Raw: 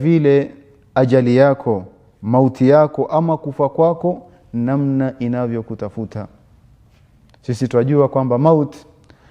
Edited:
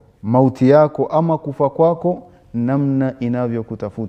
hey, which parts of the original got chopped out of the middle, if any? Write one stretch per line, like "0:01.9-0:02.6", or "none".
none